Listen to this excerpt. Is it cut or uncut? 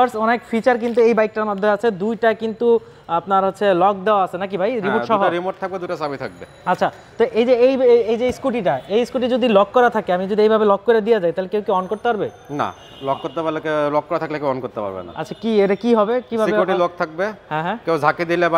uncut